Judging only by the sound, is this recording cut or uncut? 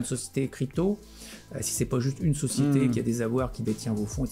uncut